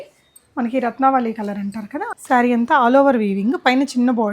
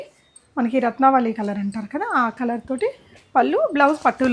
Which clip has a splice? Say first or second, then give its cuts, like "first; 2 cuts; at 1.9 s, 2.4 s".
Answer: first; 1 cut; at 2.1 s